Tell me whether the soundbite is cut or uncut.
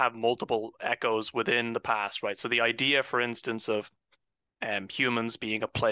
uncut